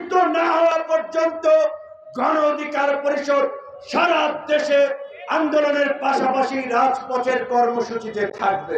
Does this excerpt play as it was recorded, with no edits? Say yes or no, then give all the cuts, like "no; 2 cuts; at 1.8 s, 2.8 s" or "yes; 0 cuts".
yes; 0 cuts